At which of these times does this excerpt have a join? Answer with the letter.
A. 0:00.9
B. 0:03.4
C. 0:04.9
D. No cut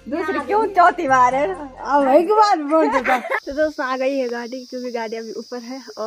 B